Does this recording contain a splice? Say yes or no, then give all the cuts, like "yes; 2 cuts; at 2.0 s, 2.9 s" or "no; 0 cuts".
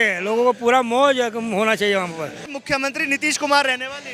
yes; 1 cut; at 2.5 s